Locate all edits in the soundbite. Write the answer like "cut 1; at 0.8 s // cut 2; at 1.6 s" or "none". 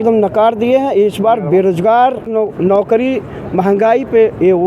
cut 1; at 2.3 s